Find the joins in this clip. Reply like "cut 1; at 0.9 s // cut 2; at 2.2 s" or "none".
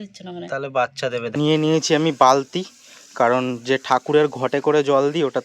cut 1; at 1.3 s